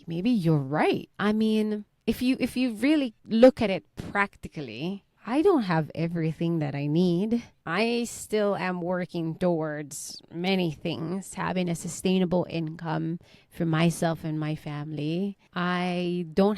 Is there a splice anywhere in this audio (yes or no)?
yes